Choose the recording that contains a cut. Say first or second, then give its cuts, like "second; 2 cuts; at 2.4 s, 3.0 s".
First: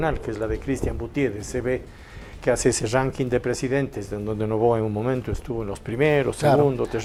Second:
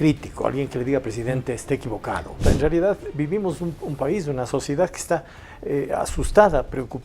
second; 1 cut; at 2.4 s